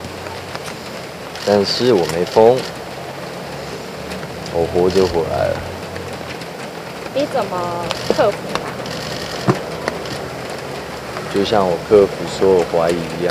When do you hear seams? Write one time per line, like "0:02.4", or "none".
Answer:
none